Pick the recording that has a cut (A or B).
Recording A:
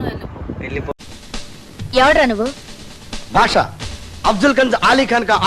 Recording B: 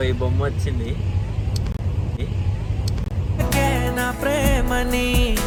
A